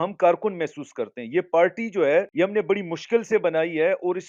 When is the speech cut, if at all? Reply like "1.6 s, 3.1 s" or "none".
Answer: 2.3 s